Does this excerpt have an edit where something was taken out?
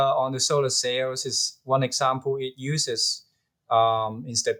no; 0 cuts

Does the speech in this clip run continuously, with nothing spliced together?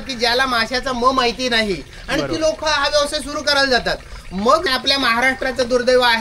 no; 1 cut; at 4.7 s

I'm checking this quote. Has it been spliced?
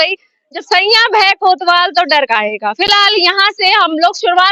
no; 0 cuts

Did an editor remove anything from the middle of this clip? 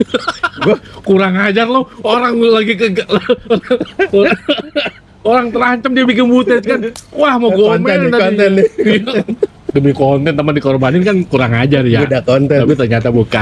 no; 0 cuts

